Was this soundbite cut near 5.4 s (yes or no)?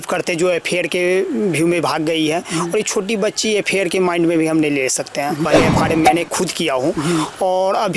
yes